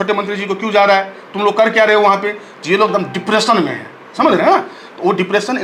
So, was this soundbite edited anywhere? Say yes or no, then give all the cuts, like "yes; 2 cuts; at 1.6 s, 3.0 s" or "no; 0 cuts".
no; 0 cuts